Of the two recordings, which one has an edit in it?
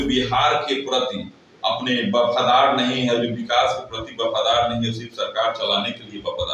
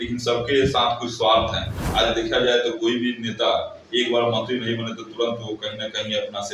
second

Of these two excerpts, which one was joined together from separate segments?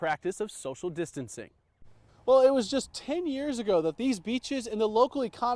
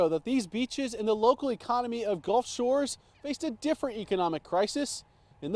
first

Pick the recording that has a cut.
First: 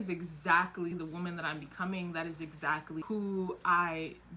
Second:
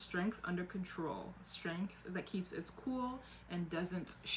first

